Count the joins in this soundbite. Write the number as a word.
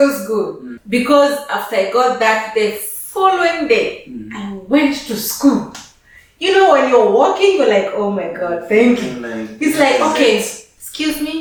zero